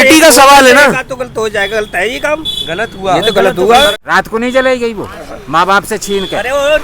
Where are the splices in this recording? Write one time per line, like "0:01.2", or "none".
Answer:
0:04.0